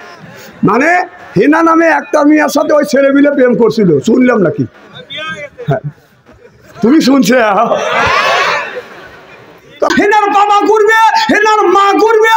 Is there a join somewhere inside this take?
yes; 1 cut; at 9.9 s

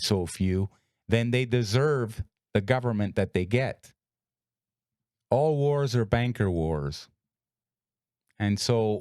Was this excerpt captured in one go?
no; 1 cut; at 3.9 s

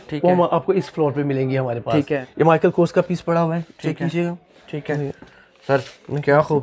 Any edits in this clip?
yes; 1 cut; at 2.3 s

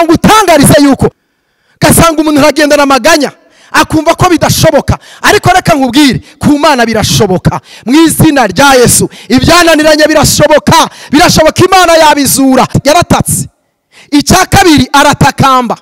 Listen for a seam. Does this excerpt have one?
yes; 2 cuts; at 1.2 s, 12.8 s

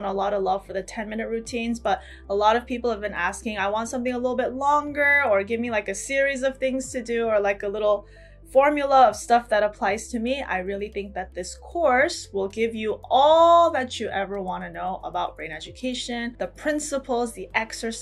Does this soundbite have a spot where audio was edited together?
no; 0 cuts

